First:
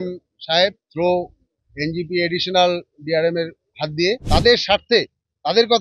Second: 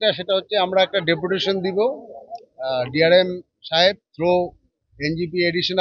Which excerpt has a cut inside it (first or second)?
first